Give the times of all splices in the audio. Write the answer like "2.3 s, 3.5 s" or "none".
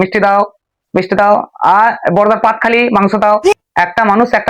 3.5 s